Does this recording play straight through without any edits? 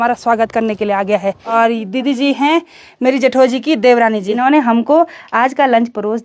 no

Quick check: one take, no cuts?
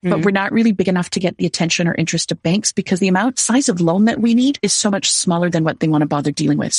no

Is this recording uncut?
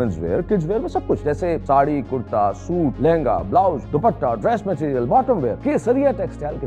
no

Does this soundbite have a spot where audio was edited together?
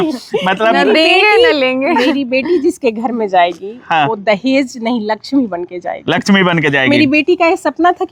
no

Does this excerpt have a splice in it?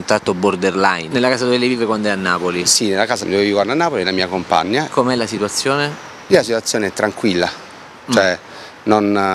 yes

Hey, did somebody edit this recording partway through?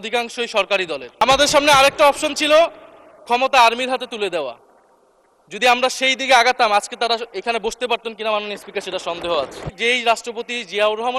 yes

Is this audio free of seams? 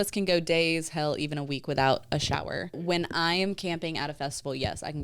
no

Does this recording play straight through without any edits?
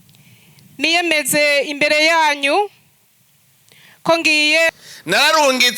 no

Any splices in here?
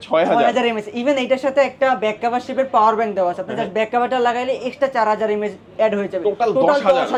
no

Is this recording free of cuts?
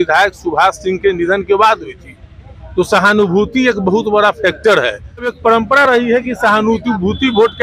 no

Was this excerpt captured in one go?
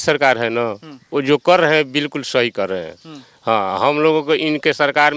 yes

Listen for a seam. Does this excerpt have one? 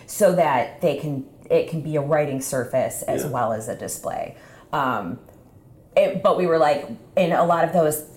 no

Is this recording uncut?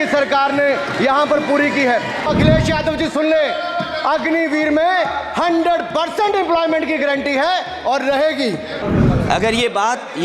no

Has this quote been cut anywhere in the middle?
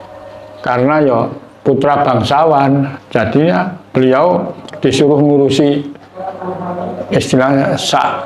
no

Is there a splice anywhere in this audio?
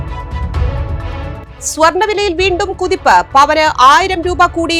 no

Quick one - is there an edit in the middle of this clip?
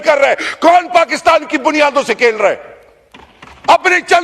no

